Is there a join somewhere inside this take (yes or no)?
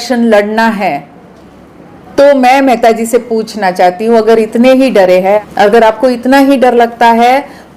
yes